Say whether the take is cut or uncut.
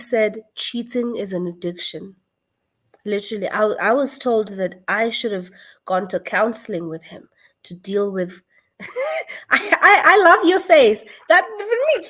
uncut